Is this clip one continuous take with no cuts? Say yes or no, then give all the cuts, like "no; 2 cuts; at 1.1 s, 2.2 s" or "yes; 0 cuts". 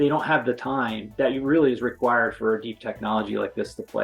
no; 1 cut; at 1.1 s